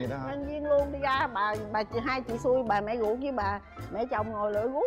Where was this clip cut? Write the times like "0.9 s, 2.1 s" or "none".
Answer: none